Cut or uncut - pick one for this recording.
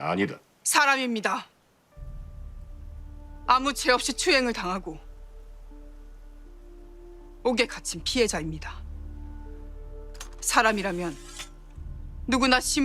cut